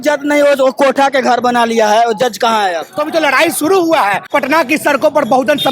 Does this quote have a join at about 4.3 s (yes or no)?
yes